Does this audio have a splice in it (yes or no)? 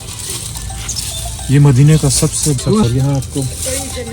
yes